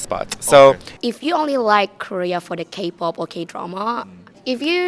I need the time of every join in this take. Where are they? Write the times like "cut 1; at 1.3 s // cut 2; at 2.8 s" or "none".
cut 1; at 0.9 s